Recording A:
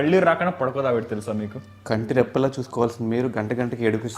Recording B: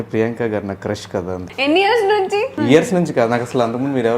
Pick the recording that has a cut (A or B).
B